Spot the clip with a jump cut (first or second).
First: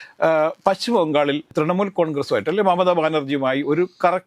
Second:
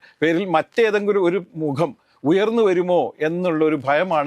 first